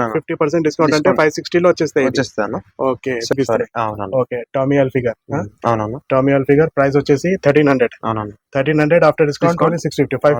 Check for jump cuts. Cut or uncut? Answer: cut